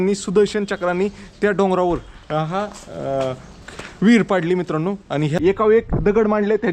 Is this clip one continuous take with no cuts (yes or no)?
no